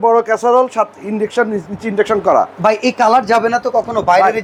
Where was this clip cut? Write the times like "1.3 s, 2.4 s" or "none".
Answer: none